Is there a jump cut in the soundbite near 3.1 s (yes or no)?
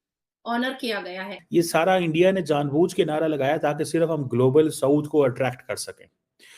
no